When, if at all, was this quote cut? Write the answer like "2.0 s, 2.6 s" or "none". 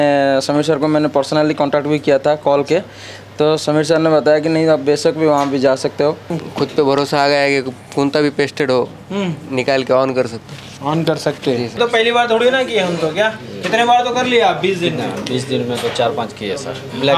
6.4 s, 11.8 s